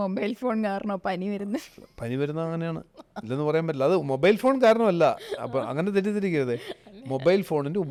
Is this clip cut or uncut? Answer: uncut